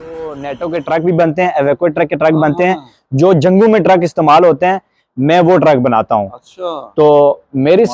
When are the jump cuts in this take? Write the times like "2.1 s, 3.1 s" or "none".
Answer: none